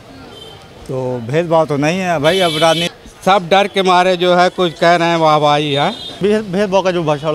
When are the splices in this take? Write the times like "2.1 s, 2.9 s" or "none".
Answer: 2.9 s, 6.2 s